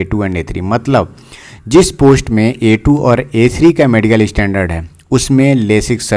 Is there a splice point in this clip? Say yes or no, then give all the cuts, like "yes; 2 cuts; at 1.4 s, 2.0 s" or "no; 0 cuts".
no; 0 cuts